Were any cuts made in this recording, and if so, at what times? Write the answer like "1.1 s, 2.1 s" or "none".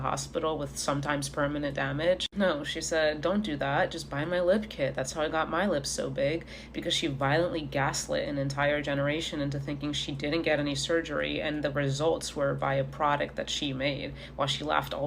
none